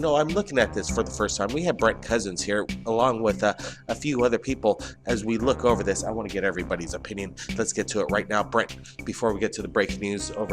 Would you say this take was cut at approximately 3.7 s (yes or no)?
yes